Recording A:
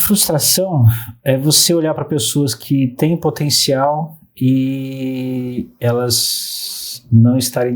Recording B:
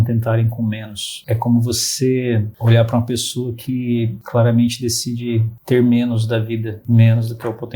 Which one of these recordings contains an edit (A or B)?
B